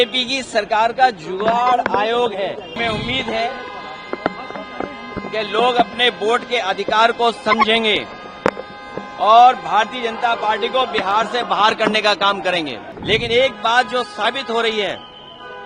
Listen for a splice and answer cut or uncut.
cut